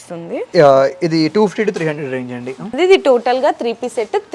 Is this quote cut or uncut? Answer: cut